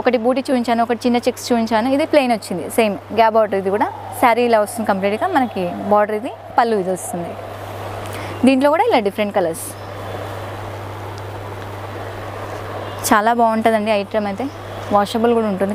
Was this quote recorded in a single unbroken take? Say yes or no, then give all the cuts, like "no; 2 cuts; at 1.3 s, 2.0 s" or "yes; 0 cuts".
yes; 0 cuts